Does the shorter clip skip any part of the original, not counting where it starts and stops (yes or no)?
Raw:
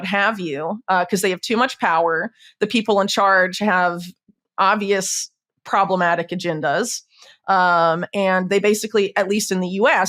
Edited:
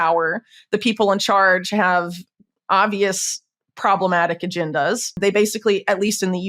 yes